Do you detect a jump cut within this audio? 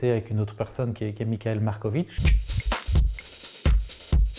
yes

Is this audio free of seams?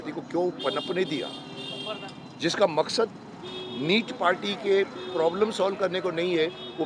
yes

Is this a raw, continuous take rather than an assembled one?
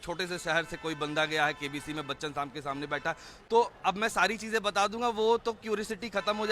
yes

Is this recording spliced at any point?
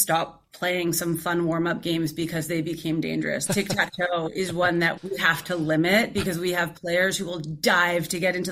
yes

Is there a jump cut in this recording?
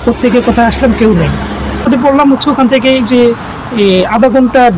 yes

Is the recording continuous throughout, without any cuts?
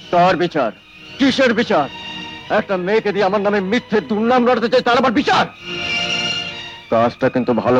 yes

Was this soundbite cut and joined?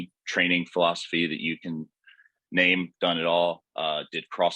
no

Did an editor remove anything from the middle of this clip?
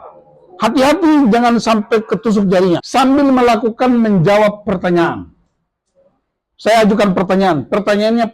yes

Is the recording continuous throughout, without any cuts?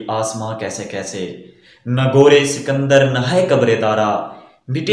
yes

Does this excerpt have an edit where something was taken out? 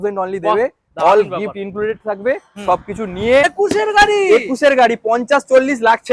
yes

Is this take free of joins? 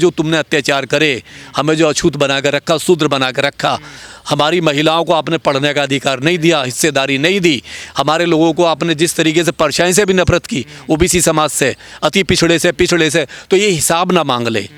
yes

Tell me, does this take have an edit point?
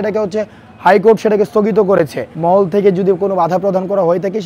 yes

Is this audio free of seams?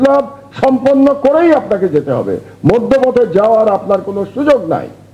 yes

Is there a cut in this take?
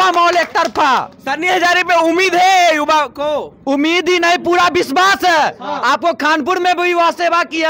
no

